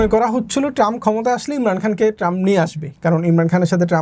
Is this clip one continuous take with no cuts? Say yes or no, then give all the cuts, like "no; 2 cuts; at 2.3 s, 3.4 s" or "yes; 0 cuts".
yes; 0 cuts